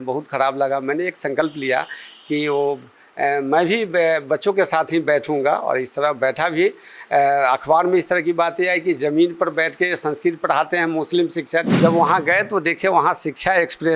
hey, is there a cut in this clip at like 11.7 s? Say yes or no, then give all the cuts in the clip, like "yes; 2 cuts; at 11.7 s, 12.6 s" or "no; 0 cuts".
yes; 1 cut; at 11.7 s